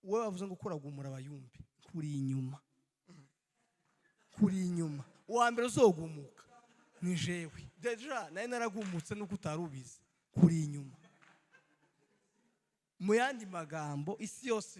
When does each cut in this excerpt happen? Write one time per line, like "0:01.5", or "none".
none

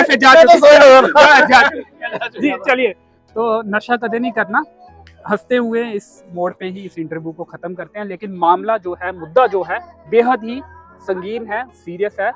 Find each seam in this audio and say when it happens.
none

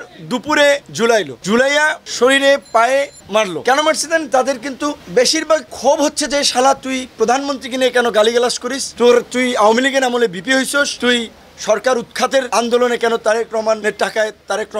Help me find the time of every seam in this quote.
none

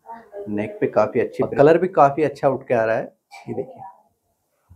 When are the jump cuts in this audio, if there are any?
0:01.5

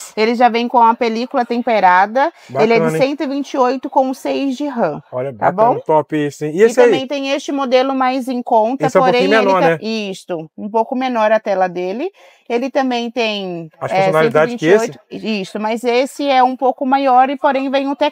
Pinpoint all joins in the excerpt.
none

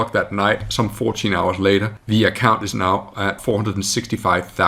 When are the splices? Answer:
0:02.0
0:03.4

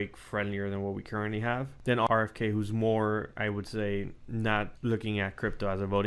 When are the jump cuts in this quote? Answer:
0:01.9
0:04.7

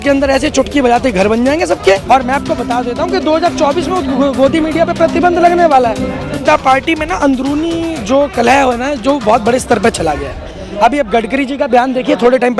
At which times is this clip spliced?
0:02.0
0:06.4

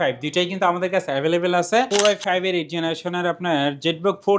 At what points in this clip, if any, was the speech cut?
0:01.9

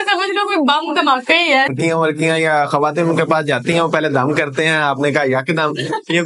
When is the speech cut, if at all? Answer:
0:01.7

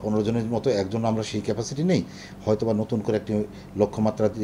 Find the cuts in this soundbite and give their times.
none

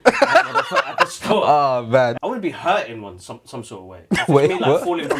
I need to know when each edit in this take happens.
0:02.1

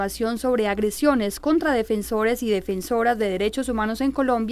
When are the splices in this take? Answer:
0:02.9

